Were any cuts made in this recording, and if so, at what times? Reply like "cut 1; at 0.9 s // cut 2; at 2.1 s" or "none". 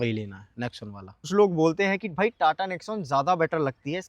cut 1; at 1.1 s